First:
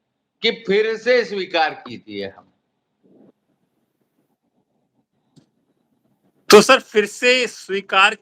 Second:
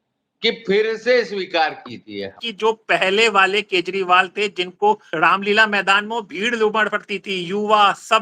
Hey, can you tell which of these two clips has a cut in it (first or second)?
second